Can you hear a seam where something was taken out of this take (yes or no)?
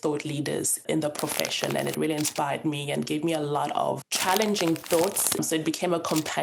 yes